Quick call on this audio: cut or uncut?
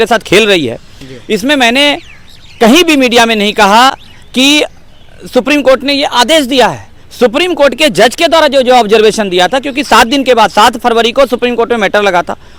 uncut